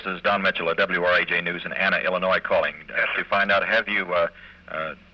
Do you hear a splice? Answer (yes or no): no